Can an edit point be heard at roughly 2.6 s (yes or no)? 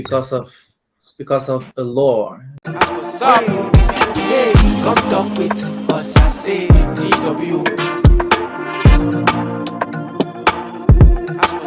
yes